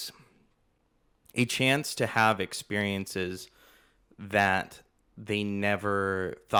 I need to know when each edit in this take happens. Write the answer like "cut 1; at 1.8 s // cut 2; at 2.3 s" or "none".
none